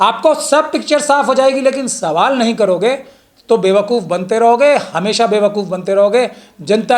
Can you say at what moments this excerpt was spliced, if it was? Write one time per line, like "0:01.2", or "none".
none